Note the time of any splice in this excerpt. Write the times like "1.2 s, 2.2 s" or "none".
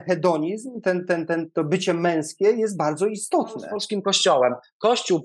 3.8 s